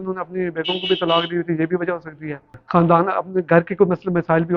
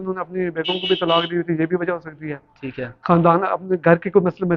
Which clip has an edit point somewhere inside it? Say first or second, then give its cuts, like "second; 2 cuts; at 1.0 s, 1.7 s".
first; 1 cut; at 2.5 s